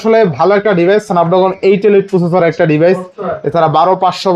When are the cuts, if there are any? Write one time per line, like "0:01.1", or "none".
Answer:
none